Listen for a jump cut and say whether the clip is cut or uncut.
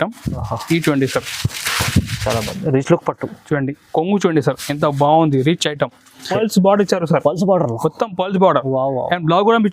cut